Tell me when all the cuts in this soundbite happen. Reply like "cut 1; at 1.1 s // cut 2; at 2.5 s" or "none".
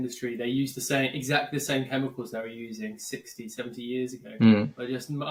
none